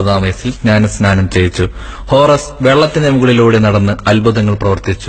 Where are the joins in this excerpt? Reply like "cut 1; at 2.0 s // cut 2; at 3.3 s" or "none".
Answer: cut 1; at 1.8 s